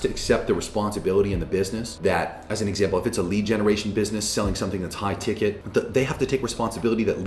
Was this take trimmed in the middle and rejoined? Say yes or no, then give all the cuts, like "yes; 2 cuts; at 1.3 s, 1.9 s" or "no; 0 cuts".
no; 0 cuts